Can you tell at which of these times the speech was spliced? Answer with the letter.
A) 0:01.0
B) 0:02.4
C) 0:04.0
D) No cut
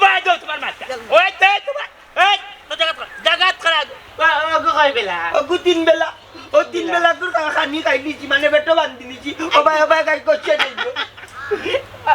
C